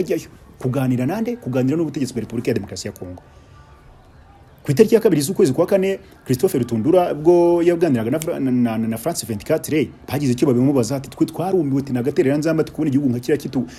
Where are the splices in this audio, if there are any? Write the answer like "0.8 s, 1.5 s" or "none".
none